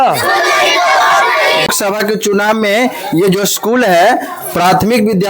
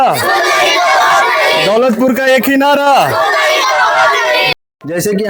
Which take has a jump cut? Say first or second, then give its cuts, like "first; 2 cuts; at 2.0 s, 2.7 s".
first; 1 cut; at 1.7 s